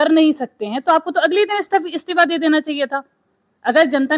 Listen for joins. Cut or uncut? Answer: uncut